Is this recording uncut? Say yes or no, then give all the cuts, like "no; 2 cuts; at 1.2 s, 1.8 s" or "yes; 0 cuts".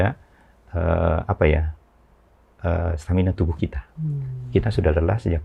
yes; 0 cuts